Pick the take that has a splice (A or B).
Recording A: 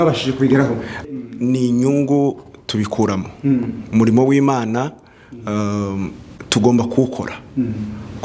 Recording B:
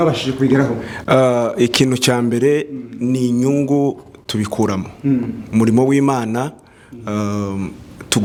A